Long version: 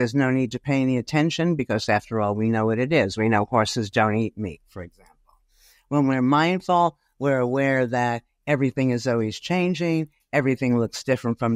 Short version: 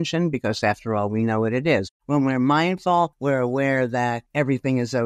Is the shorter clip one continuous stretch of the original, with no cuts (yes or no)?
no